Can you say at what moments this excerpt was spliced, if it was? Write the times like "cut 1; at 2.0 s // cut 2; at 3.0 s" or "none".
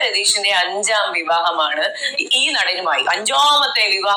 none